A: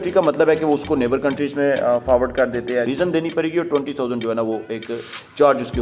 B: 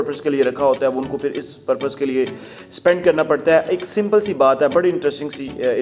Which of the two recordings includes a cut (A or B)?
A